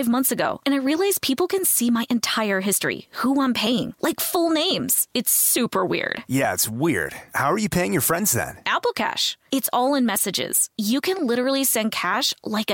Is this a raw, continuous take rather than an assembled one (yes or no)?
yes